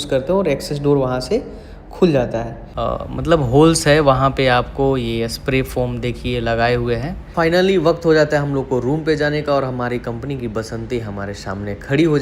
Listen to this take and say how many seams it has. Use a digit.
2